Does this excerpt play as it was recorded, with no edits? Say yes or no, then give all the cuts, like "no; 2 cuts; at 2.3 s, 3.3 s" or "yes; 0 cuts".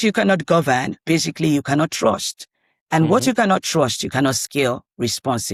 yes; 0 cuts